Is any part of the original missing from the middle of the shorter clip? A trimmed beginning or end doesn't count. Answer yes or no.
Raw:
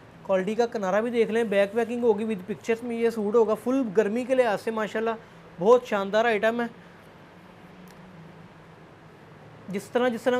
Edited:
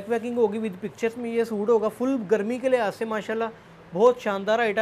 no